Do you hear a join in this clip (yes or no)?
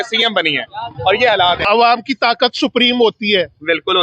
yes